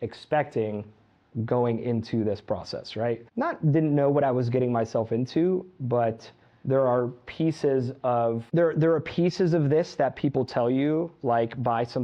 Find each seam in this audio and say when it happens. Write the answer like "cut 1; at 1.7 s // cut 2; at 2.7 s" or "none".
cut 1; at 3.3 s // cut 2; at 8.4 s